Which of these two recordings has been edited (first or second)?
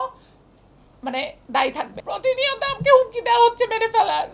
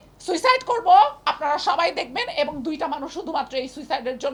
first